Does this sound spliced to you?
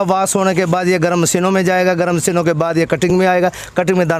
no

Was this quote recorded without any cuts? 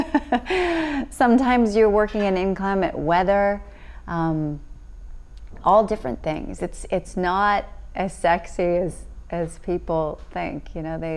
yes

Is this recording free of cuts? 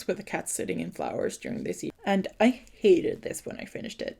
no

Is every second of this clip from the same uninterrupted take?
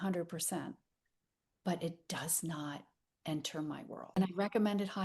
no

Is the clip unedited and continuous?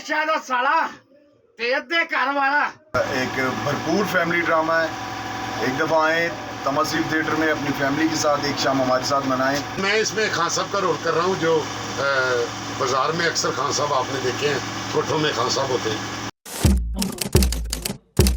no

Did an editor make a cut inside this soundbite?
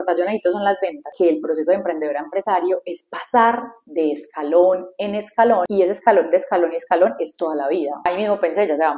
yes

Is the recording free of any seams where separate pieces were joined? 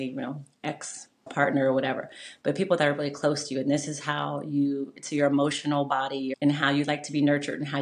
no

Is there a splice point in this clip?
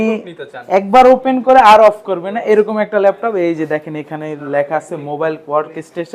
no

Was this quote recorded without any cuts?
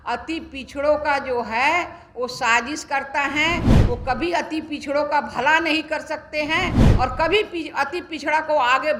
yes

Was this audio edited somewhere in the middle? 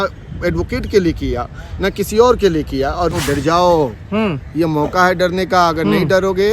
yes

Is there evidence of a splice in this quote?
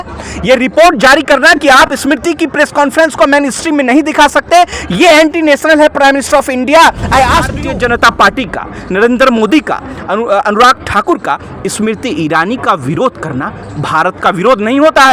yes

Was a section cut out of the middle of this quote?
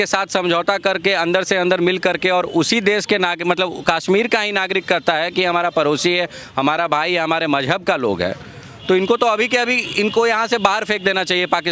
no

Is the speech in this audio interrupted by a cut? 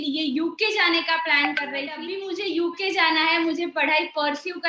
yes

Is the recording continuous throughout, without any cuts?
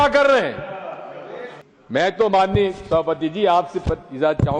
no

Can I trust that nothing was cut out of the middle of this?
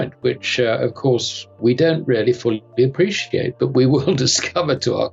yes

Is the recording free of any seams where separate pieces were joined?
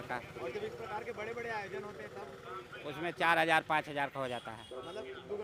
yes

